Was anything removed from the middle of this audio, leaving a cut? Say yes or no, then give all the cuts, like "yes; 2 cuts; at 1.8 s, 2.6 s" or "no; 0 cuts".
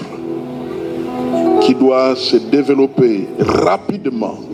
no; 0 cuts